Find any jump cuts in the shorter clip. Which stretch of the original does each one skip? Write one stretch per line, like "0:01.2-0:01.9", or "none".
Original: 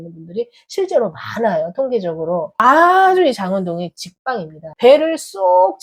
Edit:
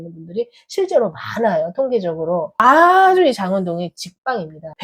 none